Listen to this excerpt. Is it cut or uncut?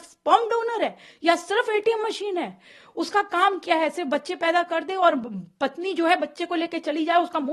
uncut